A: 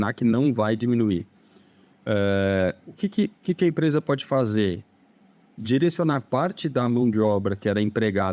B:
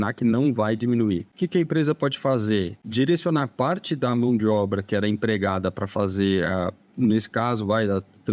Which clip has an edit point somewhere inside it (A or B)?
B